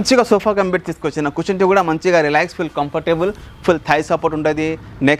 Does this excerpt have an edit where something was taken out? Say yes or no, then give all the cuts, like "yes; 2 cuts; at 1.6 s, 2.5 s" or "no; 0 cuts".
no; 0 cuts